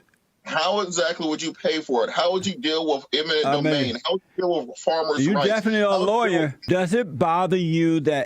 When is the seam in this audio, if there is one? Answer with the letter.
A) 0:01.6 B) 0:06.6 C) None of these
B